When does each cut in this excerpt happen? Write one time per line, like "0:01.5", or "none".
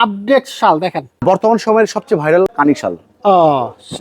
0:01.2
0:02.5